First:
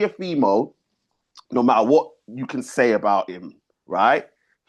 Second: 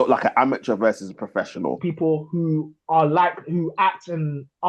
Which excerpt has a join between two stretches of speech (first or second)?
second